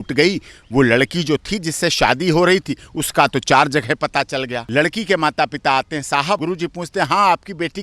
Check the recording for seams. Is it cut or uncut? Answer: cut